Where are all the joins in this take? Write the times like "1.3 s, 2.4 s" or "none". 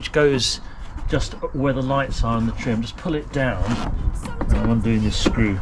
3.8 s